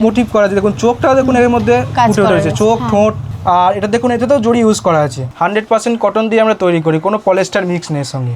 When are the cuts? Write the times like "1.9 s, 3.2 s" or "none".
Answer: 3.3 s, 5.2 s

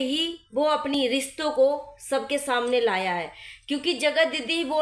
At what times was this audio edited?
0.9 s

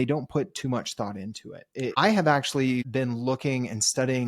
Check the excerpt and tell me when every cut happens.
1.9 s, 2.9 s

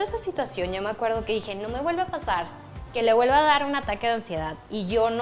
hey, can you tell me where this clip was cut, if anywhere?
none

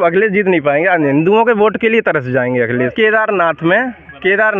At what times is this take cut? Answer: 2.9 s

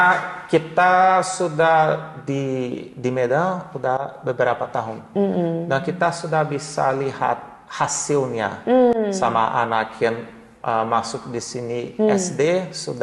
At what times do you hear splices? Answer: none

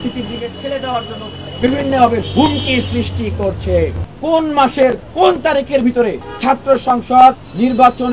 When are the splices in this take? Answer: 1.4 s, 4.1 s

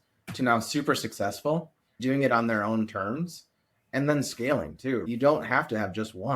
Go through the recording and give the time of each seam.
2.0 s, 5.0 s

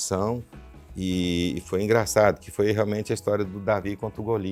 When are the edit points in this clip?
none

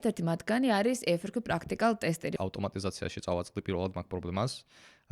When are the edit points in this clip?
2.3 s

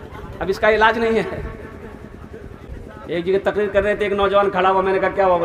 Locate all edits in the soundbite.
2.7 s

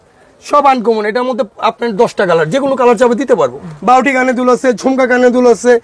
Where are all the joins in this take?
3.6 s

